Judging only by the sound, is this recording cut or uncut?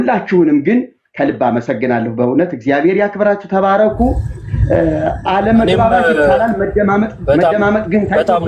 uncut